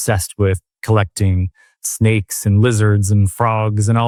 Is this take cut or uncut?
uncut